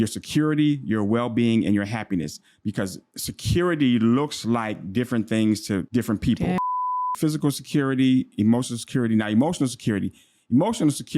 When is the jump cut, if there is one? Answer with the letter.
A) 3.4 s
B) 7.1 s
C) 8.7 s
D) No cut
B